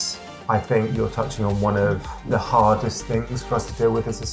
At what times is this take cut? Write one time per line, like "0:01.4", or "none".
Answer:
0:02.1